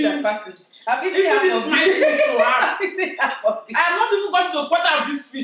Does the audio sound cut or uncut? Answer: uncut